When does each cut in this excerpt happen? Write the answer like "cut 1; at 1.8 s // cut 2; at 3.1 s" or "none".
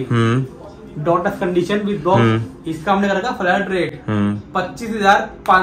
none